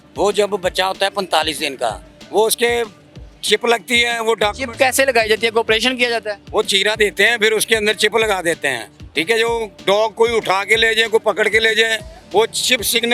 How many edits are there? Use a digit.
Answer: 0